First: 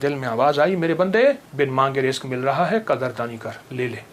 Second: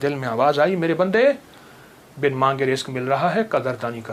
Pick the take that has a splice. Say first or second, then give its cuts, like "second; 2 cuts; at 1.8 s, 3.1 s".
first; 1 cut; at 1.5 s